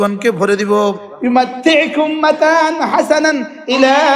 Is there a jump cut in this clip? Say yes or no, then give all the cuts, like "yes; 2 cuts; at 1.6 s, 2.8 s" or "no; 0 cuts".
yes; 1 cut; at 1.1 s